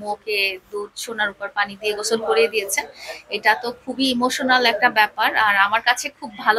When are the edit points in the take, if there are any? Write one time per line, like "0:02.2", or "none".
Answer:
none